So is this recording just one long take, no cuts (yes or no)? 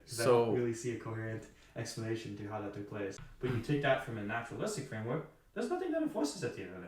no